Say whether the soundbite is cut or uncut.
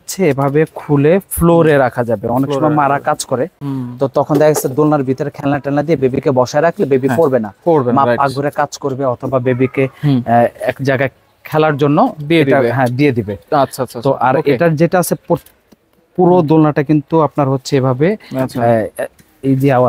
uncut